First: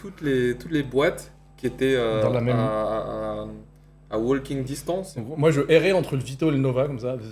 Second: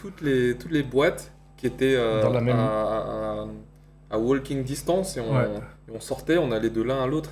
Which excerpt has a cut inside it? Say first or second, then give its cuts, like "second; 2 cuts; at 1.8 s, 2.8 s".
first; 1 cut; at 5.1 s